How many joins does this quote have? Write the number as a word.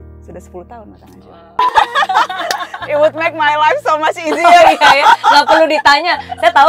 one